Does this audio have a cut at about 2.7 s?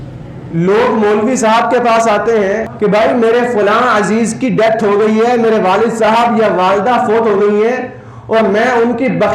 yes; 1 cut; at 2.7 s

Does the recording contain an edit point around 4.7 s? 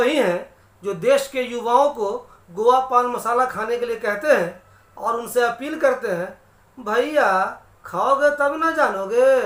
no; 0 cuts

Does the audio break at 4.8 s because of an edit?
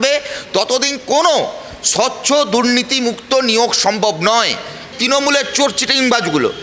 yes; 1 cut; at 4.8 s

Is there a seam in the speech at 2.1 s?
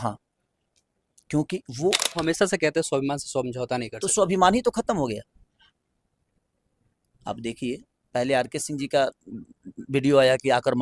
yes; 1 cut; at 2.1 s

